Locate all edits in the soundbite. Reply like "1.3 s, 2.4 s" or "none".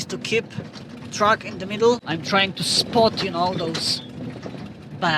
2.0 s